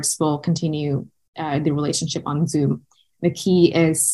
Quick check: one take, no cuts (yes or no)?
yes